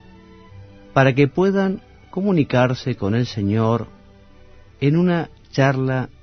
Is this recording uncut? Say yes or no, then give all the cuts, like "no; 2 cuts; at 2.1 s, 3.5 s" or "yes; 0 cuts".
yes; 0 cuts